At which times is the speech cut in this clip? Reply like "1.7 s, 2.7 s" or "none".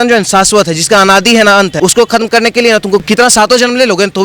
1.7 s, 3.0 s